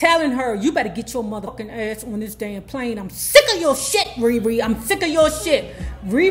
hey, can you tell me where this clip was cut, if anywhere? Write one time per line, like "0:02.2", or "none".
0:01.5